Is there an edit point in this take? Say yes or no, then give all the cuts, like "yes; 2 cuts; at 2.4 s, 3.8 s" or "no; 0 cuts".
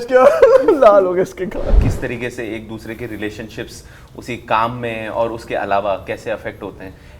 yes; 1 cut; at 1.8 s